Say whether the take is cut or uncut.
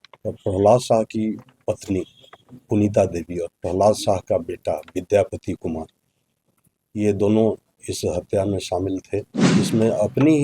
cut